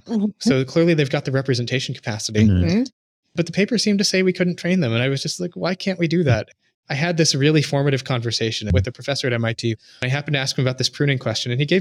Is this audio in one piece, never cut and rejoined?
no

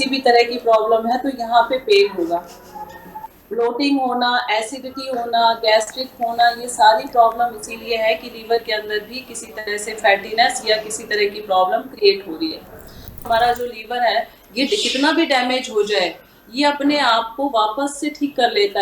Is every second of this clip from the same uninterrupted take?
no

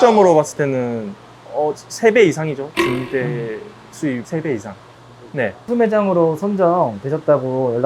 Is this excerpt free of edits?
no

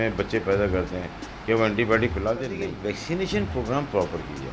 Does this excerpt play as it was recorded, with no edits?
no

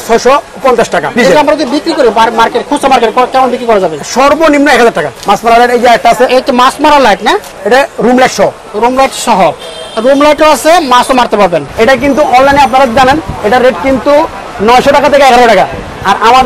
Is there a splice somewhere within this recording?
yes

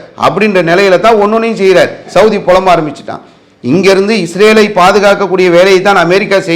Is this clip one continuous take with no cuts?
no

